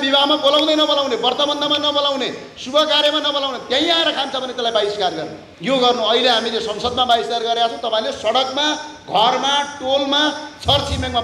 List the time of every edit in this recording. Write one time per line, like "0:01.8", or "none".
0:05.4